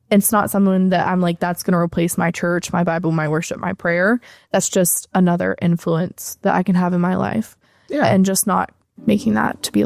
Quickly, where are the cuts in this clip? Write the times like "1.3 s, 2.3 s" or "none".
none